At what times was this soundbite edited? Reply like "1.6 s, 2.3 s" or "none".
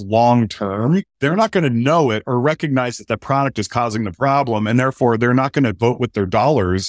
1.1 s